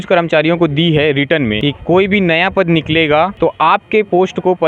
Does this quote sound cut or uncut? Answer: cut